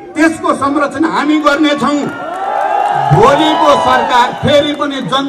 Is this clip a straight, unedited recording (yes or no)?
yes